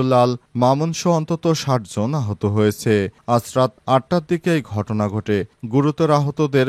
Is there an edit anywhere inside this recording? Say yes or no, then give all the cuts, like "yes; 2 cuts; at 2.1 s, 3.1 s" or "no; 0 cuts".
no; 0 cuts